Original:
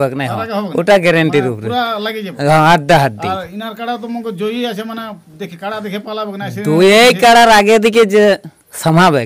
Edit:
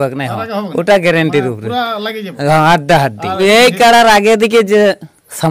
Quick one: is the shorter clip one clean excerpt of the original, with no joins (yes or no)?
no